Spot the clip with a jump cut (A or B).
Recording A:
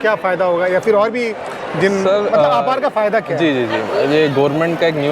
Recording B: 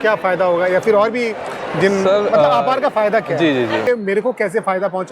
B